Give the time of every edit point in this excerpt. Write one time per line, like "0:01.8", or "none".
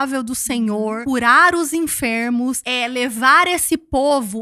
0:01.0
0:02.7